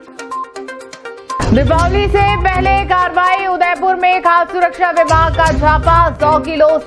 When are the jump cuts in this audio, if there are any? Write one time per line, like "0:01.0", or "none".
0:01.3